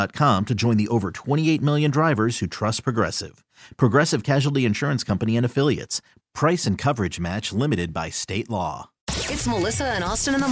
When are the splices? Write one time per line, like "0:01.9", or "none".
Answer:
0:09.0